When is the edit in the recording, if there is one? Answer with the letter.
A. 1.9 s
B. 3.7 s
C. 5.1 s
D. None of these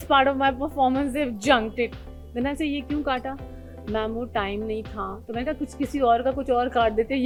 D